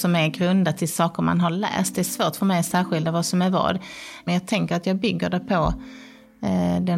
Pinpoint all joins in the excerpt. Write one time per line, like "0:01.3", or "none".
0:04.3